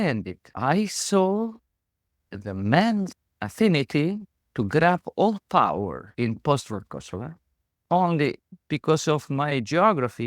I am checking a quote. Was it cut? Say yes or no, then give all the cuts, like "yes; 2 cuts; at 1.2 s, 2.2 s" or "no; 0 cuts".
yes; 2 cuts; at 3.1 s, 8.5 s